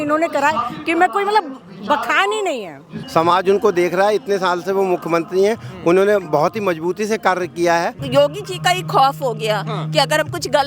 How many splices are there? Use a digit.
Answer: 2